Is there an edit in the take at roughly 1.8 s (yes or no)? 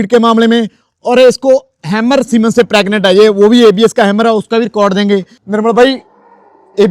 no